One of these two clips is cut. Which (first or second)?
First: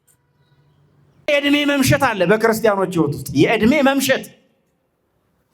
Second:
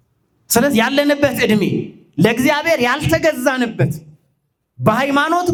first